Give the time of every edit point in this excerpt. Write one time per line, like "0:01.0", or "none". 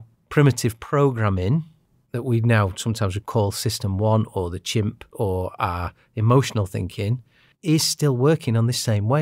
0:05.0
0:07.5